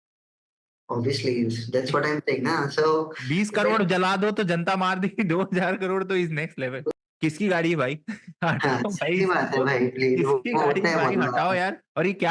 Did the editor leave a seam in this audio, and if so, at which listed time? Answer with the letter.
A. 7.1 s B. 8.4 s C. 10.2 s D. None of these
A